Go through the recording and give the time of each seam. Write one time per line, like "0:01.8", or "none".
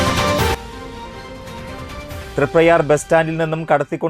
none